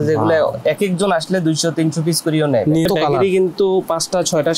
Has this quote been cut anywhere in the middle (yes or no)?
yes